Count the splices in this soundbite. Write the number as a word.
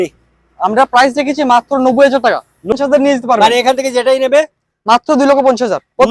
one